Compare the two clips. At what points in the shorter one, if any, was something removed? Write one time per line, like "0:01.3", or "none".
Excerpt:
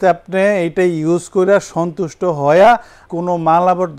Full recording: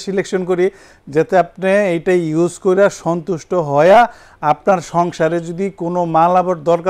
0:03.0